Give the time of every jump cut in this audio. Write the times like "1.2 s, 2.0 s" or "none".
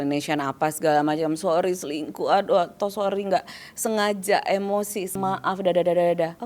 5.2 s